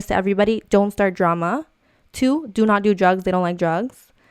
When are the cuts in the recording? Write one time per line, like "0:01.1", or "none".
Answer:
none

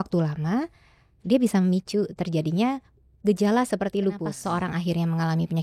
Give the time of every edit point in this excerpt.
0:04.3

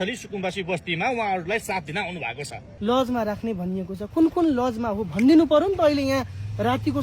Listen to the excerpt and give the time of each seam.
0:02.7

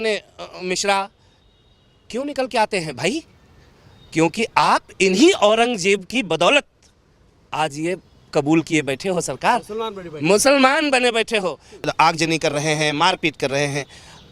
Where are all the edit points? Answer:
0:11.8

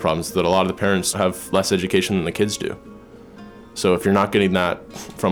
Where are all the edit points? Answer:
0:01.1

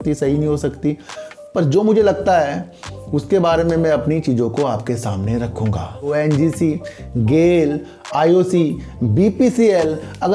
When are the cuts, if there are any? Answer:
0:06.1

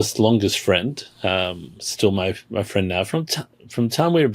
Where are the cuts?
none

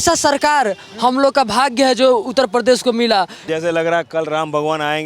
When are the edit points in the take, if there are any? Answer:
0:03.4

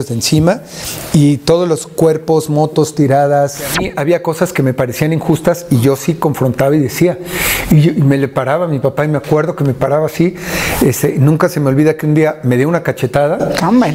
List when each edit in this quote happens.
0:03.7

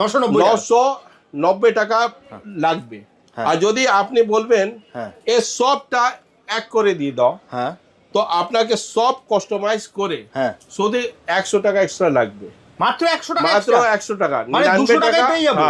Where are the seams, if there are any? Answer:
none

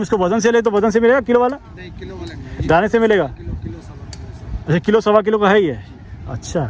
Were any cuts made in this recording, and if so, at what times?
none

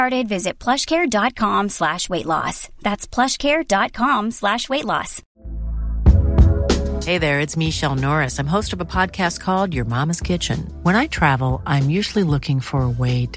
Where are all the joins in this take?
none

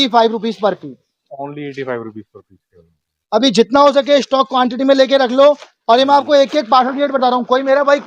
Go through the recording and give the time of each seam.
none

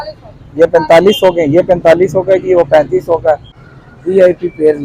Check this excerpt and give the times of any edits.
0:03.6

